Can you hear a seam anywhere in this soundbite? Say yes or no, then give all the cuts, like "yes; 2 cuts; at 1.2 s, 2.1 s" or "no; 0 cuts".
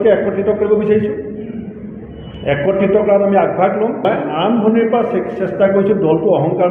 yes; 1 cut; at 4.0 s